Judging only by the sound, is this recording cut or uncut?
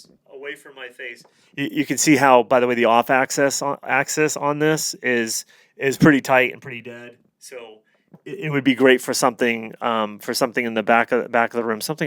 uncut